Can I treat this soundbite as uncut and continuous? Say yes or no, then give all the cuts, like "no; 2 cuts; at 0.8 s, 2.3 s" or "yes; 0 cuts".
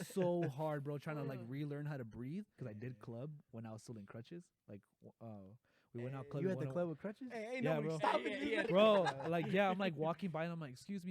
no; 2 cuts; at 2.6 s, 8.6 s